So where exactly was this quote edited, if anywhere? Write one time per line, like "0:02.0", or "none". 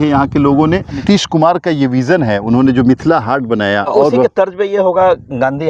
0:01.0
0:03.9